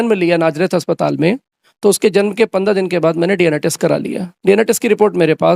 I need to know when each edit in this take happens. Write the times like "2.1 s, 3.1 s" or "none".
none